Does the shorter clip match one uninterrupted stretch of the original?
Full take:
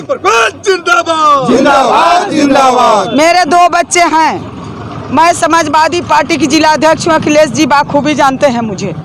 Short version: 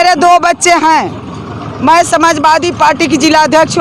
yes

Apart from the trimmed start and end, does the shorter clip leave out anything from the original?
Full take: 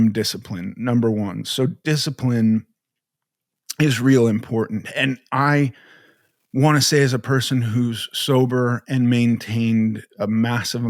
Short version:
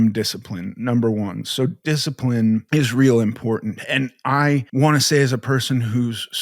yes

